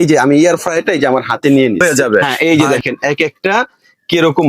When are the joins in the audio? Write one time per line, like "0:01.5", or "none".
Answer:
0:01.8